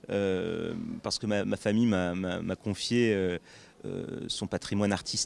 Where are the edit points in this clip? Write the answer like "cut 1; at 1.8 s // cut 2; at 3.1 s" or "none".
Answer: none